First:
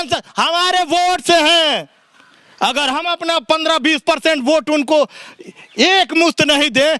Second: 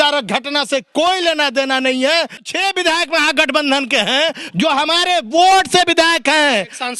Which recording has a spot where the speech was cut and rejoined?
second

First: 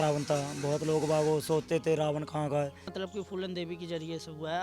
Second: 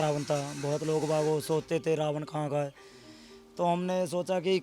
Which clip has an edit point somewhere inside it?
first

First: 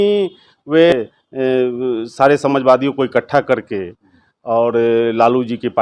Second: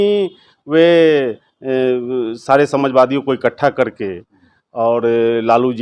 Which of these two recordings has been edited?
first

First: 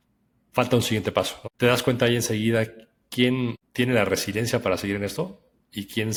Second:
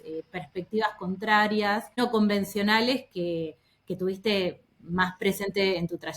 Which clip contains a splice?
second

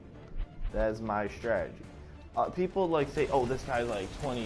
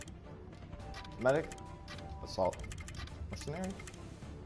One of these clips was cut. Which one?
second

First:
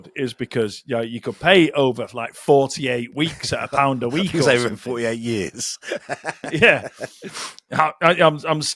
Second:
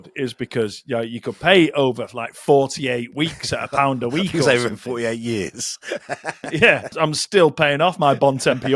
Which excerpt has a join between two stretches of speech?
second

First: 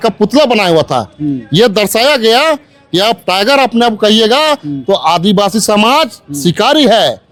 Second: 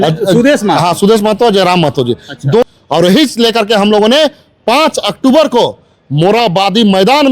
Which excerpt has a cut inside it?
second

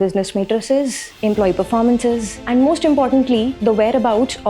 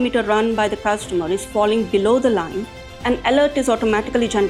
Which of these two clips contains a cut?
first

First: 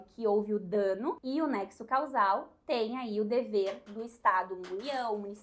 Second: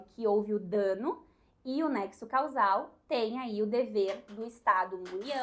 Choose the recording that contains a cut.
first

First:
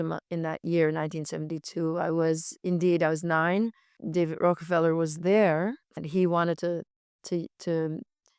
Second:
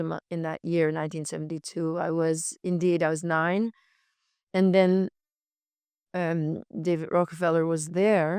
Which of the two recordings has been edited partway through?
first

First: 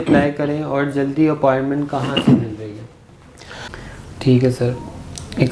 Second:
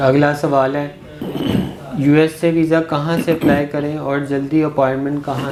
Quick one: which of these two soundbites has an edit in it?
first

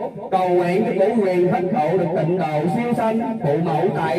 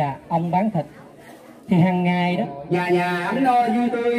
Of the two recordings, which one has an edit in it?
second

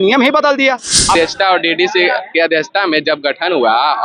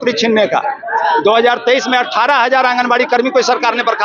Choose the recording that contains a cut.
first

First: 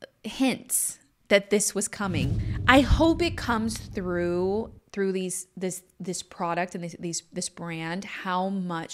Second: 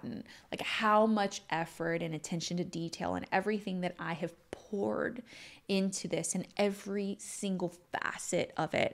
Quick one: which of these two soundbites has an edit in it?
first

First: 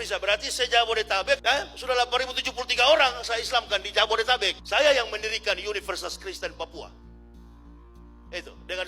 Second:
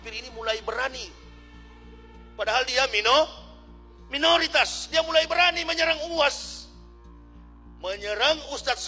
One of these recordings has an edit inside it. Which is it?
first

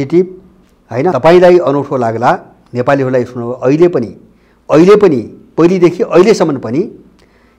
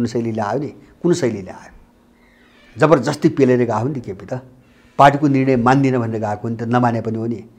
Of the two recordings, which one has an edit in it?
first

